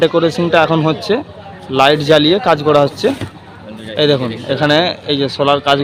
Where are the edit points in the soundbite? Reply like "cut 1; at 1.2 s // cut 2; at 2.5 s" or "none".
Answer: none